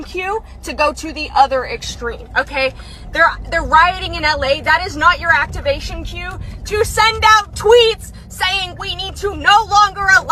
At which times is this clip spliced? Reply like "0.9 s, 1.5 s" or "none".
none